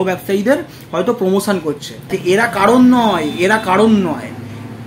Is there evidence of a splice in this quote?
yes; 1 cut; at 2.1 s

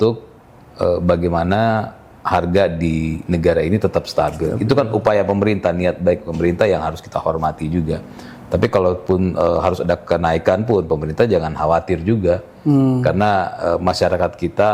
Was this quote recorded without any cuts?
yes; 0 cuts

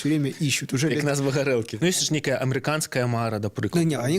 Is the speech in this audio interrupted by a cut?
yes; 1 cut; at 1.7 s

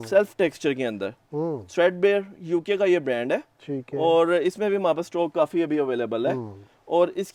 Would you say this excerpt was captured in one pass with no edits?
yes; 0 cuts

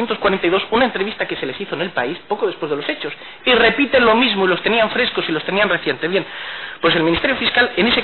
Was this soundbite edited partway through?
no; 0 cuts

